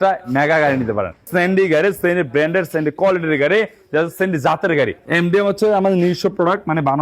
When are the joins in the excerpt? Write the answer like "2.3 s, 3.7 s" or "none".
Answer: 1.3 s, 5.0 s